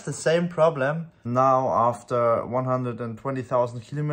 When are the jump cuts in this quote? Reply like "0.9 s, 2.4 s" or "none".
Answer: 1.2 s